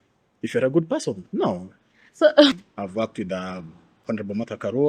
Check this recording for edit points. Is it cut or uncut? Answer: cut